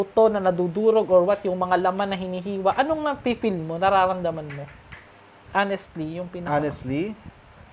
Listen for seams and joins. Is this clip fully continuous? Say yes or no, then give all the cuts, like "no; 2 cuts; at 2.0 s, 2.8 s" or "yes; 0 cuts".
yes; 0 cuts